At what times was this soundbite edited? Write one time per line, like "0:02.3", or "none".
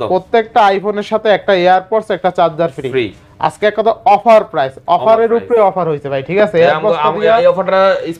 none